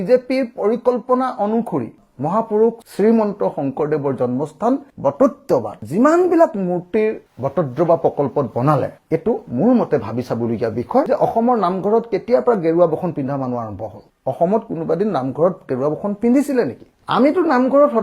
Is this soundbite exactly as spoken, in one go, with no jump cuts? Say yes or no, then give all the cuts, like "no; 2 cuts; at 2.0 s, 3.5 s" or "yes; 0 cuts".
no; 1 cut; at 11.1 s